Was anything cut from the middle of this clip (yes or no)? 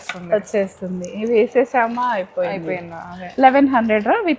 no